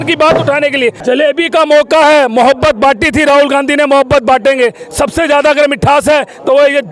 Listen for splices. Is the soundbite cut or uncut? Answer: cut